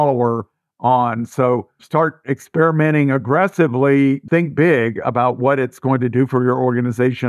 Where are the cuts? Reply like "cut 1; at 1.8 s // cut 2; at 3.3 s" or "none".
cut 1; at 1.8 s // cut 2; at 4.2 s